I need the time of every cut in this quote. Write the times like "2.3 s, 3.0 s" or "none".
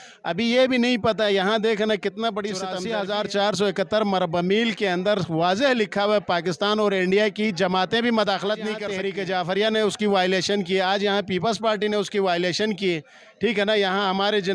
2.8 s, 8.9 s